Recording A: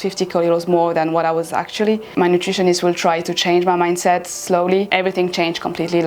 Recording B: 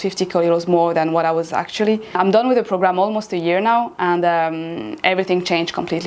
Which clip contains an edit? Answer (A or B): A